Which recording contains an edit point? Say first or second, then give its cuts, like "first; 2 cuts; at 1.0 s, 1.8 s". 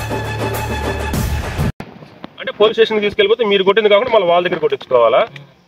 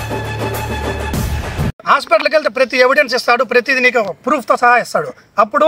second; 1 cut; at 1.8 s